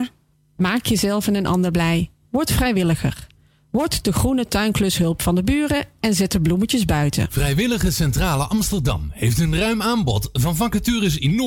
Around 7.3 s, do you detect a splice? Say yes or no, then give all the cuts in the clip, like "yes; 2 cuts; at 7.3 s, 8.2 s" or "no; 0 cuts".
yes; 1 cut; at 7.3 s